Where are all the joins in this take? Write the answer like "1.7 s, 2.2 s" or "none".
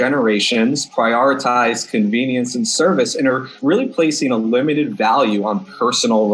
3.5 s